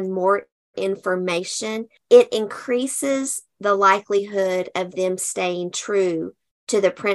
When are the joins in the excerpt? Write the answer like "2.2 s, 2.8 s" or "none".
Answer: 1.9 s

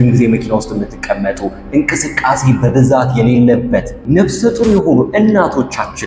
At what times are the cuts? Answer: 4.0 s

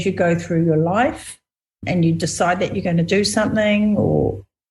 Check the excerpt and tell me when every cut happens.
1.8 s

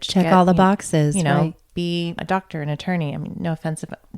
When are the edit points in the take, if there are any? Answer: 2.2 s

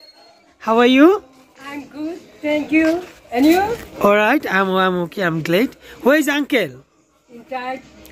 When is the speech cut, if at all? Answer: none

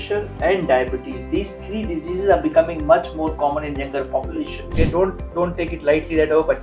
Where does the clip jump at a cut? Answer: 4.7 s

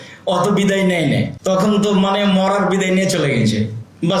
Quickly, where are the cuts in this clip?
1.3 s

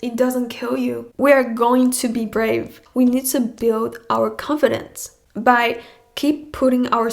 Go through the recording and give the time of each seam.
1.0 s, 2.8 s

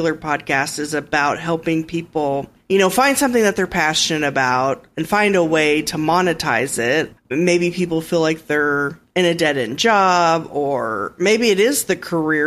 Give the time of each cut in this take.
2.5 s, 7.1 s

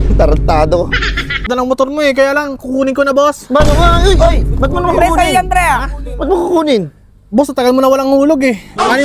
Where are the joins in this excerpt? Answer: 1.4 s

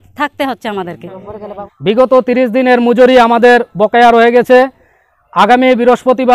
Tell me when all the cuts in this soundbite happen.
1.5 s

